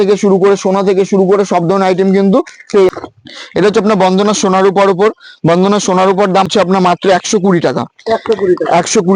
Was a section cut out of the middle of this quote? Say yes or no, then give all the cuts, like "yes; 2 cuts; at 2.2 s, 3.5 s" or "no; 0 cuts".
yes; 2 cuts; at 2.9 s, 6.5 s